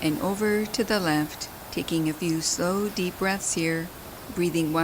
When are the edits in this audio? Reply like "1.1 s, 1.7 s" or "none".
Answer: none

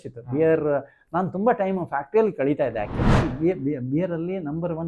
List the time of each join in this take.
3.0 s

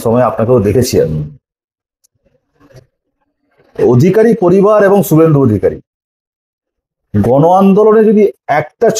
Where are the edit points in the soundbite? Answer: none

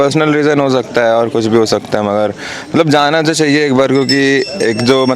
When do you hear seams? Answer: none

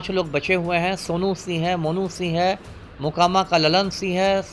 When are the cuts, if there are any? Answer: none

